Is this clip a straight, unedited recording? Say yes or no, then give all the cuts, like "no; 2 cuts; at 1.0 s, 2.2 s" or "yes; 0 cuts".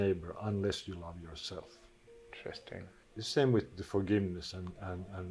no; 1 cut; at 3.0 s